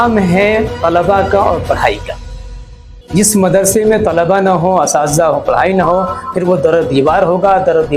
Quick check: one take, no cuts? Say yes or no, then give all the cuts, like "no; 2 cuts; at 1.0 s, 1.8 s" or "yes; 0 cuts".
yes; 0 cuts